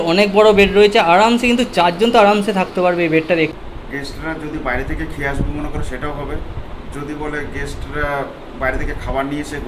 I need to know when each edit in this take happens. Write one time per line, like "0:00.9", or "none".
0:03.5